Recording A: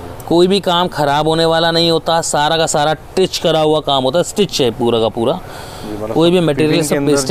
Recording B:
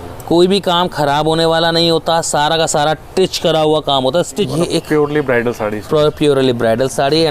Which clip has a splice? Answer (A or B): B